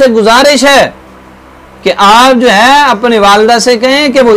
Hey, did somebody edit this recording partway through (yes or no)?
no